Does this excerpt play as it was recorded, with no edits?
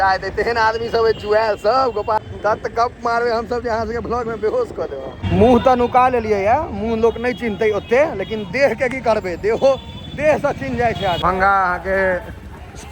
no; 3 cuts; at 2.2 s, 5.2 s, 11.2 s

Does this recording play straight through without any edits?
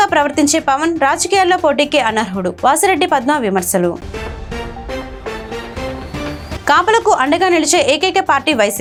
yes; 0 cuts

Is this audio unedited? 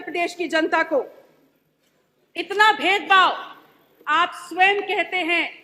yes; 0 cuts

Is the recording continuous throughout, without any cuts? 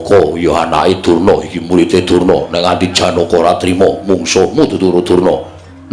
yes; 0 cuts

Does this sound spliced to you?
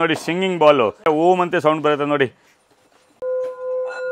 yes; 2 cuts; at 1.0 s, 3.2 s

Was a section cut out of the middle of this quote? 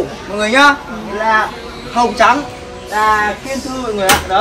no; 0 cuts

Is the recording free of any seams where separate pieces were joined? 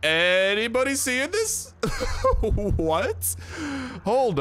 yes; 0 cuts

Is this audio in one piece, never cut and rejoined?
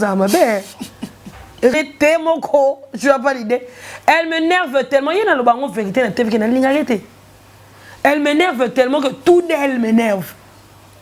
no; 1 cut; at 1.7 s

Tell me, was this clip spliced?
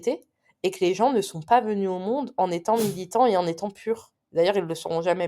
yes; 1 cut; at 4.2 s

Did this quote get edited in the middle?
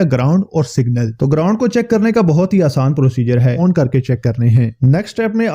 yes; 1 cut; at 3.6 s

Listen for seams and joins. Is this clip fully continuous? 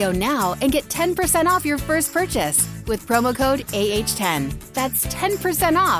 yes; 0 cuts

